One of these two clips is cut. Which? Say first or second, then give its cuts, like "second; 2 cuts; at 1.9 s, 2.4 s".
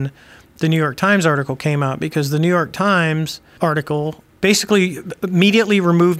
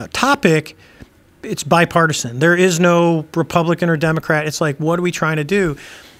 first; 2 cuts; at 3.4 s, 4.3 s